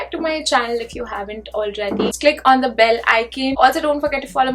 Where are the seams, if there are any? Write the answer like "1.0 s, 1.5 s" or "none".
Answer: 2.2 s